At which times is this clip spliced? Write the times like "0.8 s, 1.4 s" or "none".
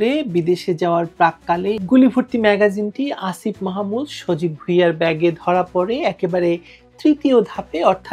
1.8 s